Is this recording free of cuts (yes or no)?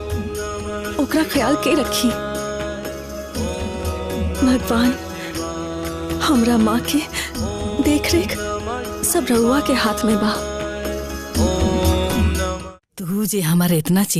no